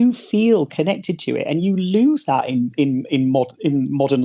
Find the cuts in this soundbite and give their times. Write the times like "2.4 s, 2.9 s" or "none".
none